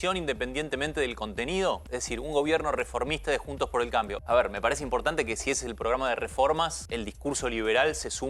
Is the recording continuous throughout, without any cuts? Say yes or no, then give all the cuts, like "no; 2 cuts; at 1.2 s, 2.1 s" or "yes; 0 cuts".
no; 3 cuts; at 1.8 s, 4.1 s, 6.8 s